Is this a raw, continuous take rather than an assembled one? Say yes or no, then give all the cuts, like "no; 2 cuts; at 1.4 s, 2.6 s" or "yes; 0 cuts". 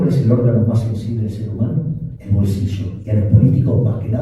no; 1 cut; at 2.1 s